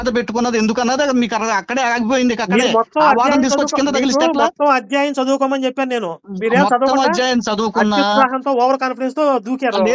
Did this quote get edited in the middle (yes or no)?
no